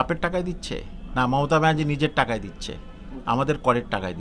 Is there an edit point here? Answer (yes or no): no